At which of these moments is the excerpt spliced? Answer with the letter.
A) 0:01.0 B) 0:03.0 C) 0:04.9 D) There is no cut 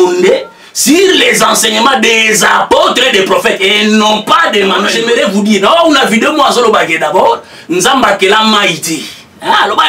C